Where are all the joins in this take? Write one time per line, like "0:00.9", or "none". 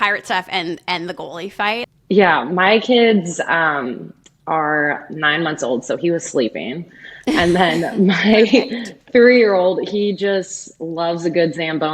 0:01.9